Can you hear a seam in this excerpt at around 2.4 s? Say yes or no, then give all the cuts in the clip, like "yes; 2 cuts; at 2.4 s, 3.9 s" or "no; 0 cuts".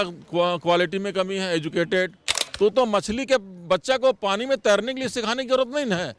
yes; 1 cut; at 2.4 s